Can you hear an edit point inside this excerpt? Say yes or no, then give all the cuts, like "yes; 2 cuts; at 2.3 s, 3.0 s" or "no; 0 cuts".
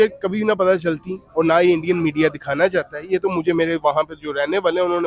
no; 0 cuts